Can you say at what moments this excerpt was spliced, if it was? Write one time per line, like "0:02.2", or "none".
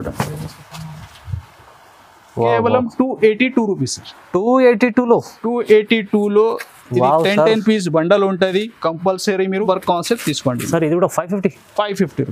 0:09.6